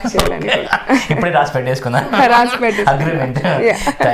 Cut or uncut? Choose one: uncut